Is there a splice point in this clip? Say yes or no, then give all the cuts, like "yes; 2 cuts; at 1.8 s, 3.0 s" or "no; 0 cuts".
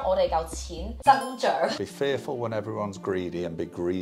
yes; 1 cut; at 1.8 s